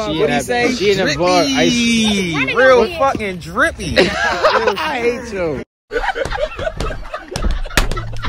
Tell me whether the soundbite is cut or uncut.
uncut